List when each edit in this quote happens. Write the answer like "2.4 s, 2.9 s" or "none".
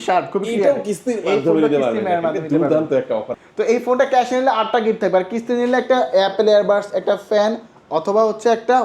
3.4 s

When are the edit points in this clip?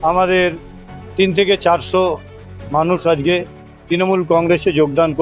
none

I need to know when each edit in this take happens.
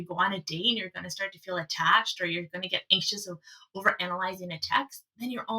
none

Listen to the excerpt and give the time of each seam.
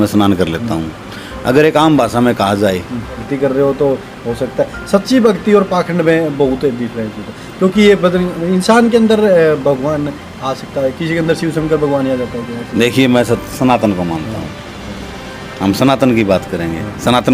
3.3 s

